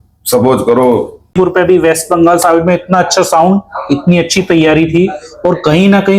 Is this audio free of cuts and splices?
no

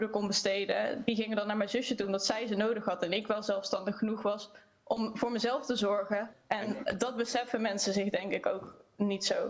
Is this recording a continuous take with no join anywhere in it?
yes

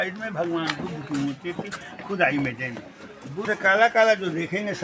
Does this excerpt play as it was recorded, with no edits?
no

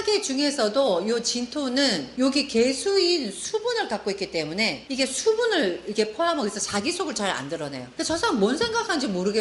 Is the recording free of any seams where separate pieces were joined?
yes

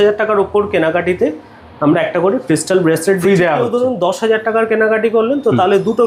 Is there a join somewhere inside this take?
no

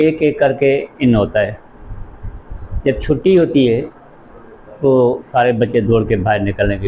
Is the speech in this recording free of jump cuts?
yes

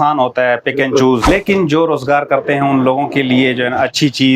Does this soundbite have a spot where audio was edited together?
yes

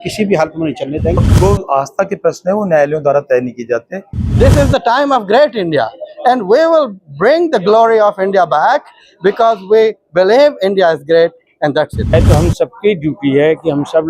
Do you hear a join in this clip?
yes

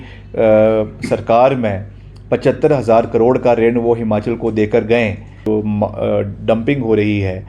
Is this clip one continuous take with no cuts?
no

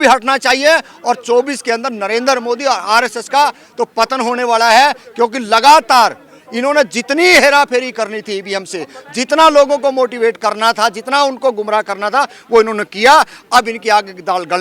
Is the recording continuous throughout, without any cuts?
yes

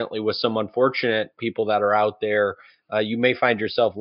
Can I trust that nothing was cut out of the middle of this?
no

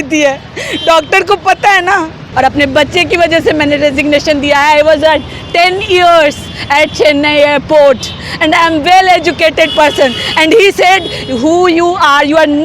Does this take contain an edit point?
yes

